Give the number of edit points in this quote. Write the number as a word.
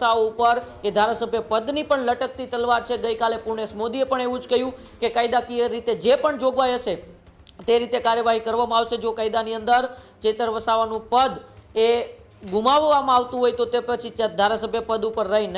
zero